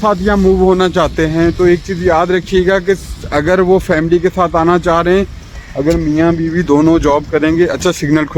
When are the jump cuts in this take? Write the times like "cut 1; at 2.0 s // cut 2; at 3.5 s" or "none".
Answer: none